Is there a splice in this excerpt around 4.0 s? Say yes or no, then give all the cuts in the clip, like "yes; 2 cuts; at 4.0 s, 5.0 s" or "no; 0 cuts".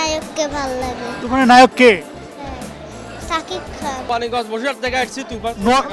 yes; 1 cut; at 4.0 s